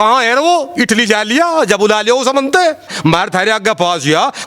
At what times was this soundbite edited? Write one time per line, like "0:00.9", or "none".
0:02.9